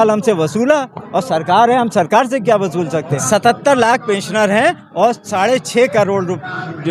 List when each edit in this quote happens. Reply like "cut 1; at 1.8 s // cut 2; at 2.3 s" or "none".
cut 1; at 3.2 s